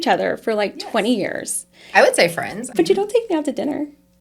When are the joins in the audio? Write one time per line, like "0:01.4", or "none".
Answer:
0:02.7